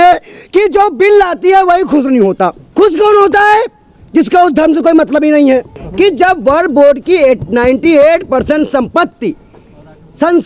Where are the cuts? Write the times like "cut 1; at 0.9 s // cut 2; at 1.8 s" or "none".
cut 1; at 2.6 s // cut 2; at 5.8 s